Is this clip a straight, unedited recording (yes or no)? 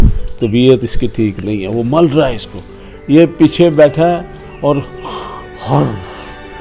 yes